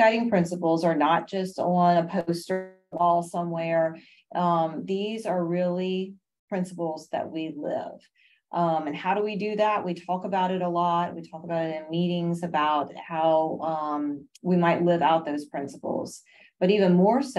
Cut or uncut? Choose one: uncut